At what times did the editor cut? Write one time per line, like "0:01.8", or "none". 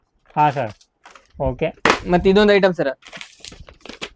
none